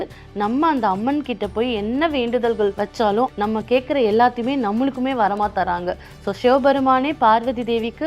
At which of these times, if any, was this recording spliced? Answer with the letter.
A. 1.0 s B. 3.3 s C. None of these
B